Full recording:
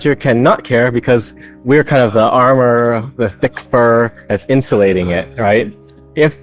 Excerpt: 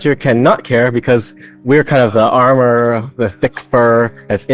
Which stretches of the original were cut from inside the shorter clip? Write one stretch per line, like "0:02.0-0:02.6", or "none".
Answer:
none